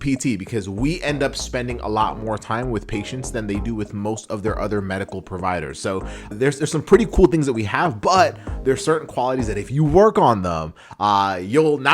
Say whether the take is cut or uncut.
cut